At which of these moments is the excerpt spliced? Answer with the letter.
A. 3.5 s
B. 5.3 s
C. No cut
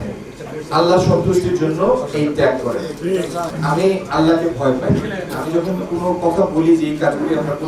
A